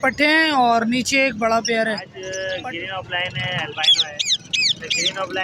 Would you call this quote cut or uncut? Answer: cut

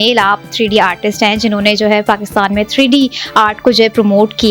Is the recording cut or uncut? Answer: uncut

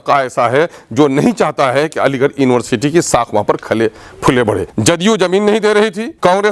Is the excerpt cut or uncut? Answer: cut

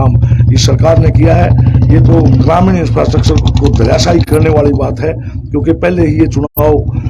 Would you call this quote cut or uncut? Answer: uncut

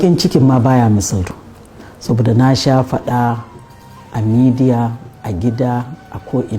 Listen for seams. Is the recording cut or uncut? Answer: cut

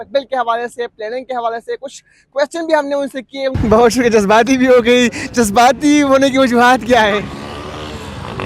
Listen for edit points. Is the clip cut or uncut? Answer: cut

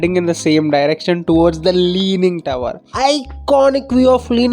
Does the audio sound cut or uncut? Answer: cut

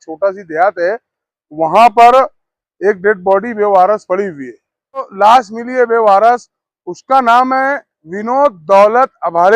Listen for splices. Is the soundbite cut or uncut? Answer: cut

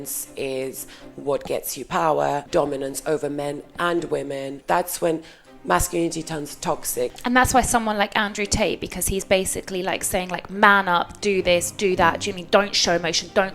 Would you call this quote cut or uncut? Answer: cut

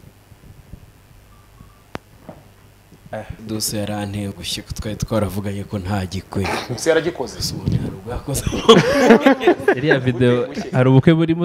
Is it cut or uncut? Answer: cut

